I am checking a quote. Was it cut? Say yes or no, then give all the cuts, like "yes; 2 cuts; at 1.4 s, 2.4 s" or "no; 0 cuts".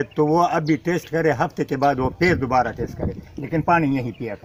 no; 0 cuts